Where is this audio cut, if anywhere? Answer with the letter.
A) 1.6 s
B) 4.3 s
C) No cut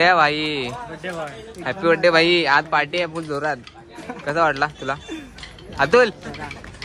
C